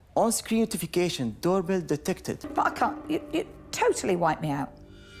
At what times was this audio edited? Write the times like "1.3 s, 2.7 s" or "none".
2.3 s